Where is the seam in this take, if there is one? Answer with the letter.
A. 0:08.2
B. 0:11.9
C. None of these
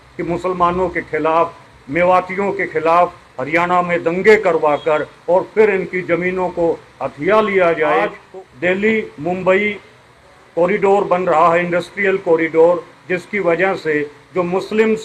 A